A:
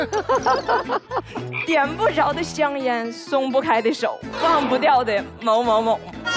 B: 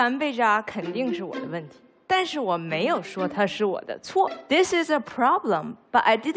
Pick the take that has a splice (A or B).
B